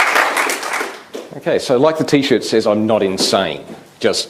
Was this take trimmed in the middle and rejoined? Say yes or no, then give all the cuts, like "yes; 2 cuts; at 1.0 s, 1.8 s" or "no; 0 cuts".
no; 0 cuts